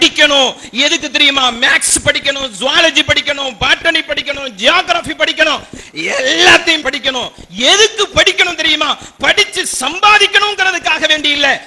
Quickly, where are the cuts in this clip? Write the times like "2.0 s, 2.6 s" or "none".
6.8 s

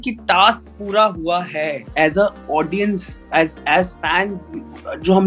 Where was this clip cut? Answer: 1.9 s

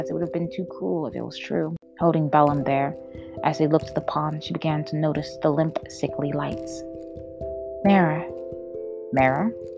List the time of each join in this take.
1.8 s

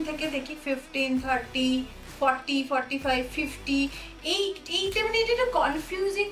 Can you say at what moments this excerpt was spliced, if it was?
none

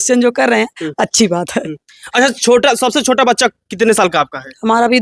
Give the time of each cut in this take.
none

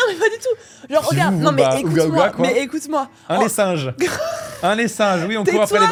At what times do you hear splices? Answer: none

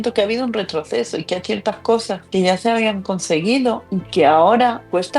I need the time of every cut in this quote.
none

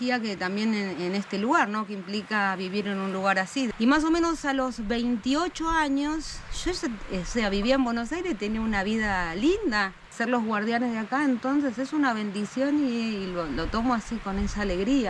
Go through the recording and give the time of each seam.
3.7 s, 10.1 s

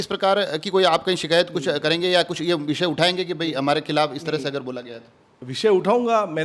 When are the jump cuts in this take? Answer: none

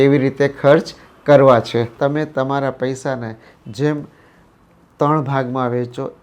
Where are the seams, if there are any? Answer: 1.9 s

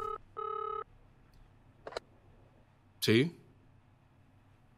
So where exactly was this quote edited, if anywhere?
none

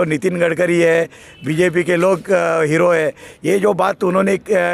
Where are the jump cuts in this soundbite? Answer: none

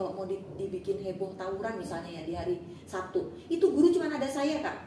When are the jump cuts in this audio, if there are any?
none

